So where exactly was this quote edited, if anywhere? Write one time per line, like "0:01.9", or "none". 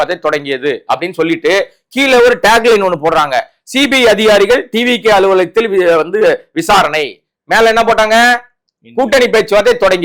none